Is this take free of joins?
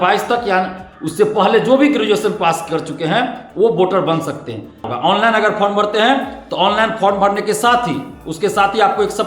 no; 1 cut; at 4.9 s

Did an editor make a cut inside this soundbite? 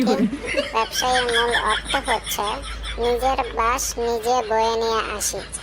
no; 0 cuts

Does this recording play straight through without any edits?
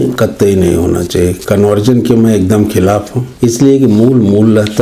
no; 1 cut; at 3.2 s

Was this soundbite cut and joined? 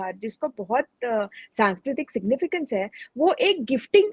no; 0 cuts

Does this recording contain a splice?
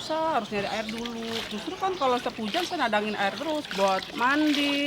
yes; 1 cut; at 3.7 s

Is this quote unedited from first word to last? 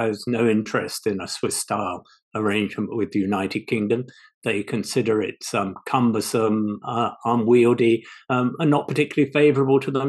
yes; 0 cuts

